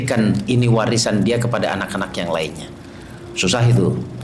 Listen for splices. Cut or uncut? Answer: uncut